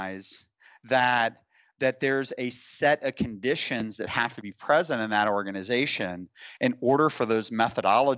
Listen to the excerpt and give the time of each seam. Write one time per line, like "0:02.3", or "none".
none